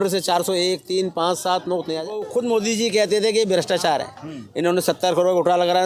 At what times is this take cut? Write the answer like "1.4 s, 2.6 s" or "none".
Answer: 2.2 s